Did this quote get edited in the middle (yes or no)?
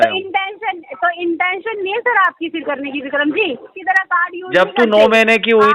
yes